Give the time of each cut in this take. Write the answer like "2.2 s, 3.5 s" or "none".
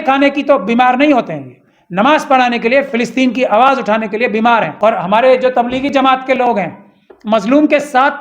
4.7 s

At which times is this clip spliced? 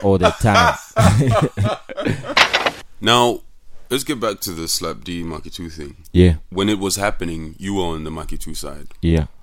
2.7 s

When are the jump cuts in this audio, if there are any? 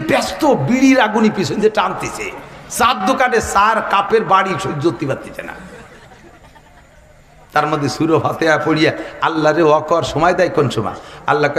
none

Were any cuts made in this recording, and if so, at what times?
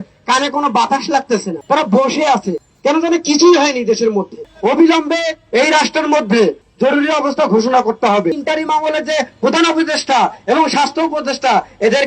1.6 s, 4.5 s, 8.4 s

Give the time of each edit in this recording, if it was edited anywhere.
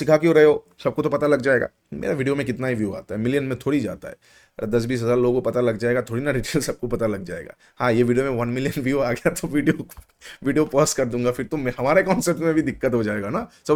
none

